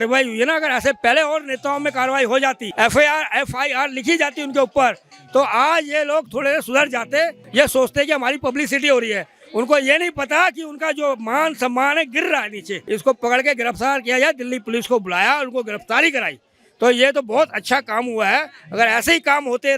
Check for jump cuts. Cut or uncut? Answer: cut